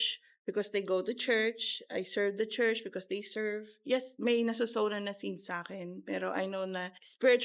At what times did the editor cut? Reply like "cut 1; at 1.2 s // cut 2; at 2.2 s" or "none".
none

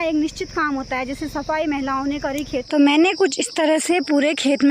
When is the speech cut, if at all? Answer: cut 1; at 2.6 s

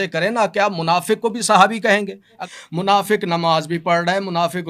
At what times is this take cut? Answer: cut 1; at 2.4 s

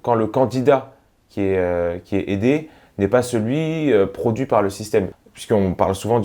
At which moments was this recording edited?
cut 1; at 5.1 s

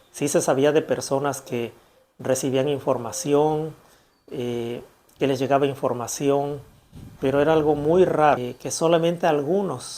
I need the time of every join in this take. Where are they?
cut 1; at 8.4 s

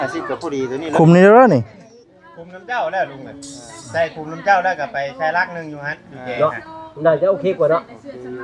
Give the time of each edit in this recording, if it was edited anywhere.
none

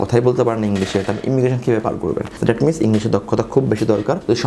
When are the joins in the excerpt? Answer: cut 1; at 2.3 s

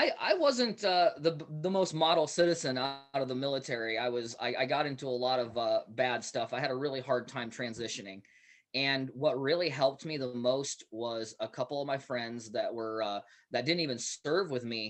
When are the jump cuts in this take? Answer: none

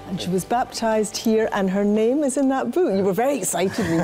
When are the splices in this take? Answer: none

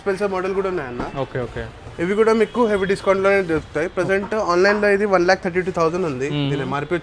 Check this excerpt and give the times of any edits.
none

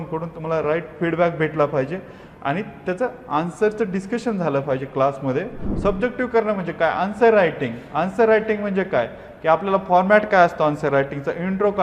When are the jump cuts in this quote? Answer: cut 1; at 5.6 s

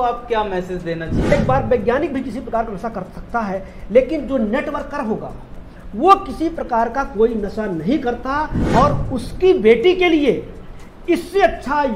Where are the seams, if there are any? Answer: cut 1; at 1.3 s

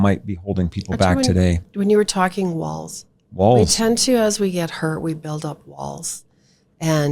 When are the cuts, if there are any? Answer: none

